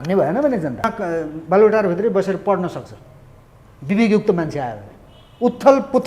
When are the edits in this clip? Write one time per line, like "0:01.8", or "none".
0:00.9